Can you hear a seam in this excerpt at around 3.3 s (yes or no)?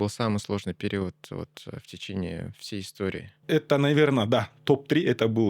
yes